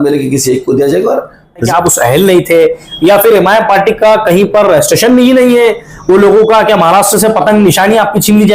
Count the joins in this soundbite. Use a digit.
1